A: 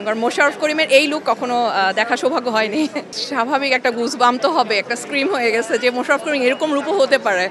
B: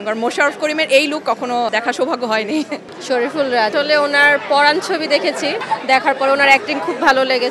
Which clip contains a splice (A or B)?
B